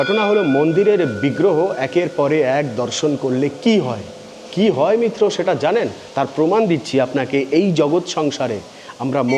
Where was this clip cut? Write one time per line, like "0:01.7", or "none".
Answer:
none